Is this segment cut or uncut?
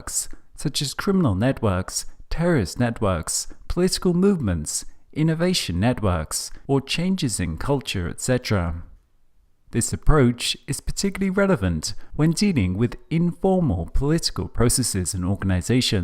uncut